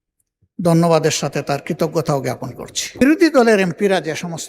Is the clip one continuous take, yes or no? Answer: no